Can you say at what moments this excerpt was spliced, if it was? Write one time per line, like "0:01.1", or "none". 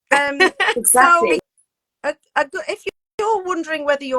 0:01.4